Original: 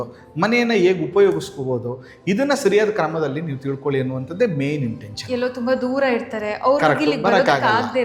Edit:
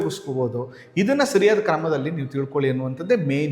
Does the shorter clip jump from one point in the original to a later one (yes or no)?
no